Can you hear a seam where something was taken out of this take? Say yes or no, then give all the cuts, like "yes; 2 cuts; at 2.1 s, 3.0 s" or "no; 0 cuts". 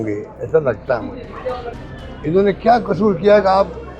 yes; 1 cut; at 1.8 s